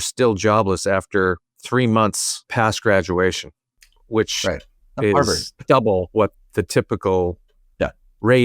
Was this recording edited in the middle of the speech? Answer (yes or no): yes